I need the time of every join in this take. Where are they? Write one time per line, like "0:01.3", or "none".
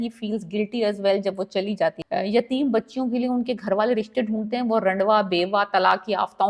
0:02.0